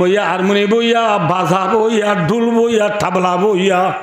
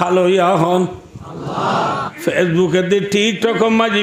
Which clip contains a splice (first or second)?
second